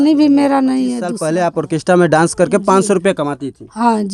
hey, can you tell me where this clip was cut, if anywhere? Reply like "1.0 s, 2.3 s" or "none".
1.1 s